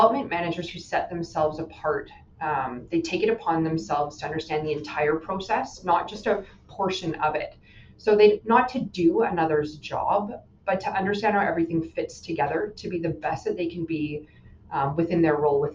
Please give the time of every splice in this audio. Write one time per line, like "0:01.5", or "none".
none